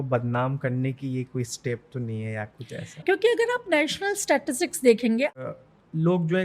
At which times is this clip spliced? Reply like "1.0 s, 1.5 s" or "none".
5.4 s